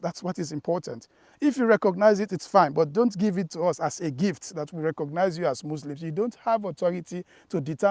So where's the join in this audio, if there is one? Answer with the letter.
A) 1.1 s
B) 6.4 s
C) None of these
C